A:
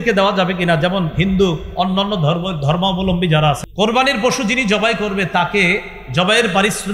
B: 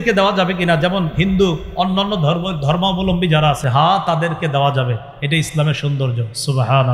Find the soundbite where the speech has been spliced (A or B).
A